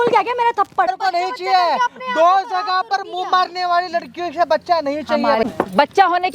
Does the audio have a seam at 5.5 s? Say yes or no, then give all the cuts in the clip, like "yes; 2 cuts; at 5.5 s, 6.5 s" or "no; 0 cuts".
yes; 2 cuts; at 0.9 s, 5.5 s